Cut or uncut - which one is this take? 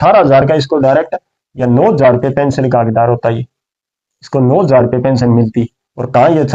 uncut